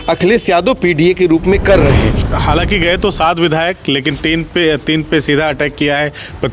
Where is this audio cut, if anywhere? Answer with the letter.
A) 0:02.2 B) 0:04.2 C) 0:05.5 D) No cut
A